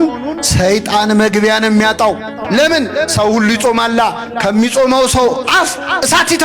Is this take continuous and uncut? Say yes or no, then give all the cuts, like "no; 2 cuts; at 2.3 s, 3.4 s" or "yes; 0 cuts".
no; 1 cut; at 2.3 s